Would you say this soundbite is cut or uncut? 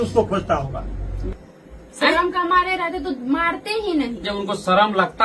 cut